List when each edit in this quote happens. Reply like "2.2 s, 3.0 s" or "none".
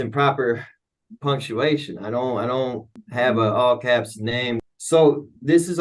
3.0 s, 4.6 s